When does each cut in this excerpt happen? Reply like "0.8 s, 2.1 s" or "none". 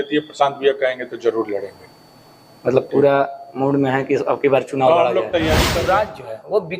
5.7 s

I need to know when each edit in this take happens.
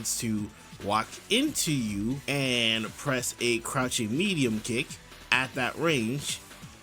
2.2 s

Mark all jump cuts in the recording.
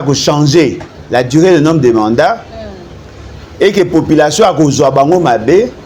none

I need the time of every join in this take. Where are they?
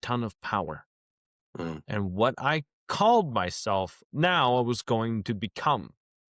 4.0 s

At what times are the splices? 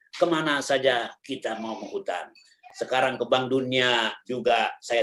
none

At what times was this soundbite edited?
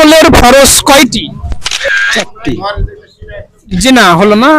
1.9 s

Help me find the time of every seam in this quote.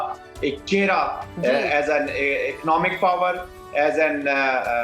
none

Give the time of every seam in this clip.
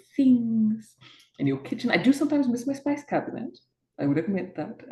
none

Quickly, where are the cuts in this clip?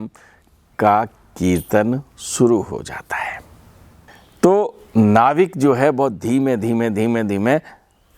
4.2 s

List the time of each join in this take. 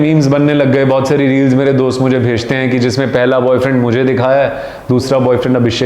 none

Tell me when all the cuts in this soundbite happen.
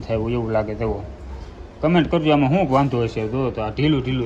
none

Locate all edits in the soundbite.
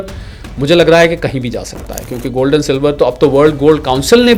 none

